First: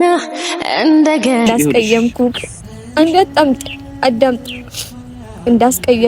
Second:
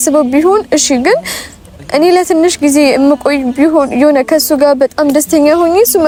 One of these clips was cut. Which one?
first; 1 cut; at 1.5 s

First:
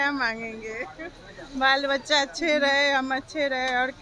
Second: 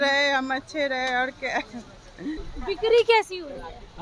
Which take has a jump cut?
second; 1 cut; at 2.4 s

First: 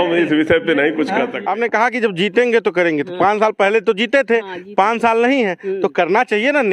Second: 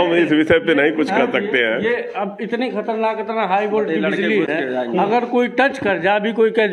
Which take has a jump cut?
first; 1 cut; at 1.4 s

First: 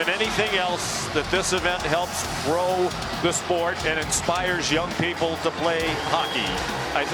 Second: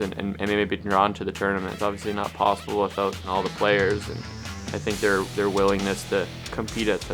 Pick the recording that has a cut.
second; 2 cuts; at 1.8 s, 3.2 s

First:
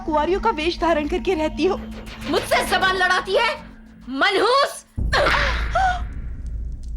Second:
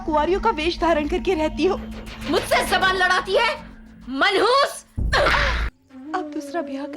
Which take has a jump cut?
second; 1 cut; at 5.6 s

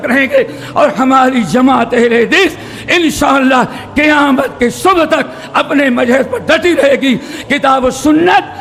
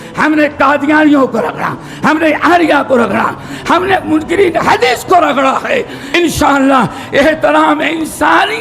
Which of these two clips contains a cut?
second; 1 cut; at 6.0 s

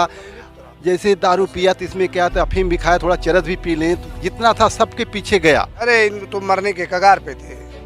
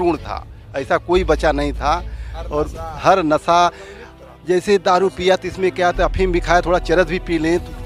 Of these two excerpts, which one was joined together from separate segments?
first; 1 cut; at 5.9 s

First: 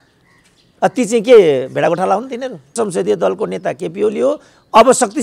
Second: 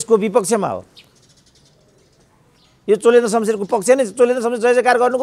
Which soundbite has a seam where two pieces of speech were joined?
first; 1 cut; at 2.7 s

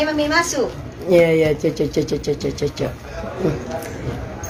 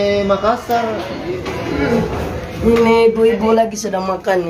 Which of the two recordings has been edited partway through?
second; 1 cut; at 1.2 s

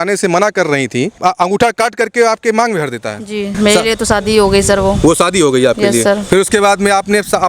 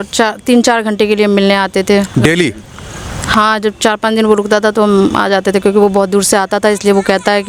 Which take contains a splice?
first; 2 cuts; at 1.2 s, 3.5 s

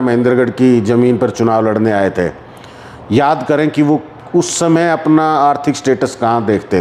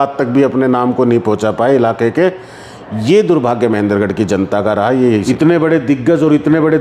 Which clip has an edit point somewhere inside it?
second; 1 cut; at 5.2 s

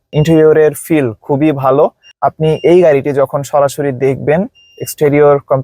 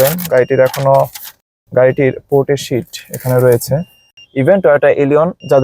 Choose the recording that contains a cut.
second; 1 cut; at 4.2 s

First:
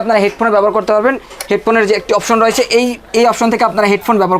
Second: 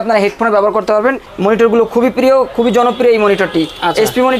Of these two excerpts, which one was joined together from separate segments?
second; 1 cut; at 1.3 s

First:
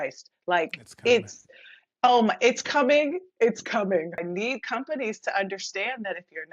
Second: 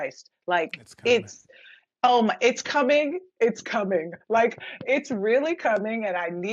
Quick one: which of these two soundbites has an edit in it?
first; 1 cut; at 4.2 s

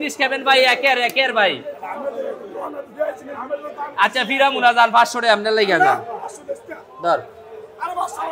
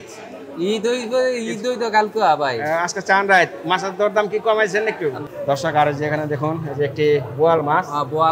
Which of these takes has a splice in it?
second; 1 cut; at 5.2 s

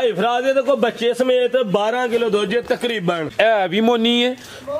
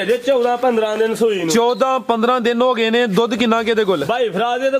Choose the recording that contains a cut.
first; 1 cut; at 3.3 s

